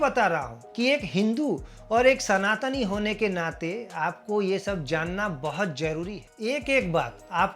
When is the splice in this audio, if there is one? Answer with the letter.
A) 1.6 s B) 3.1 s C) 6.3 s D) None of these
C